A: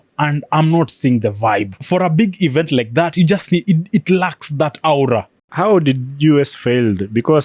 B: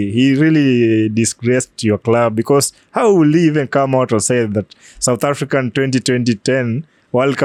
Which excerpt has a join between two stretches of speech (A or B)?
A